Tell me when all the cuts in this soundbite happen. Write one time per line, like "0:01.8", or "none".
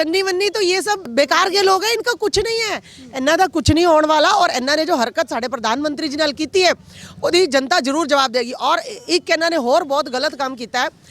0:01.1